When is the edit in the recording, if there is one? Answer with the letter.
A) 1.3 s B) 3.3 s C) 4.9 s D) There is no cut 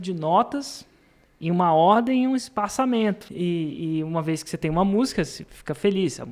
B